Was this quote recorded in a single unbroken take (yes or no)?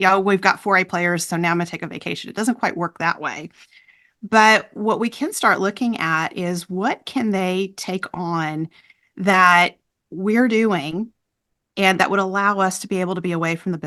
yes